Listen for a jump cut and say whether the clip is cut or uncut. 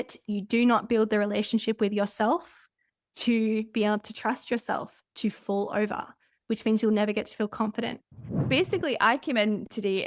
cut